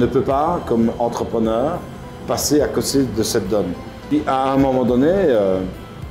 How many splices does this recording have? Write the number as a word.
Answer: one